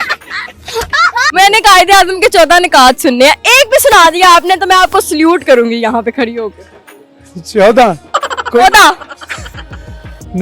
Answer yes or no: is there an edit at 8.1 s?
no